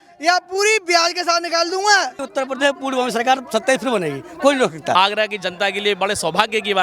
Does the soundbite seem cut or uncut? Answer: cut